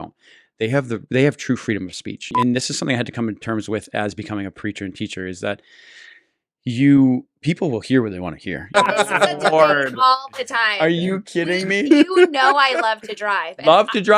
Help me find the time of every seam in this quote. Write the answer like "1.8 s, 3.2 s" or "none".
2.3 s, 8.7 s